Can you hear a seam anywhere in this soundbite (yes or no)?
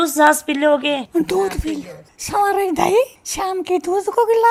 no